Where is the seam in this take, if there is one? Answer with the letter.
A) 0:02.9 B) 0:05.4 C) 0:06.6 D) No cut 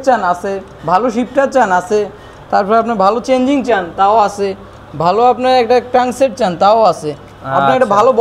D